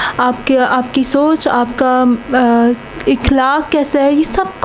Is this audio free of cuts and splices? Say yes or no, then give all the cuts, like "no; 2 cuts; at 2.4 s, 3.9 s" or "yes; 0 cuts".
yes; 0 cuts